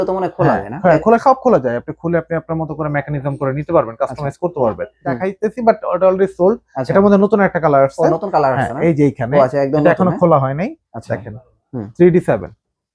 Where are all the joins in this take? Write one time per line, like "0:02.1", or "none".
0:05.2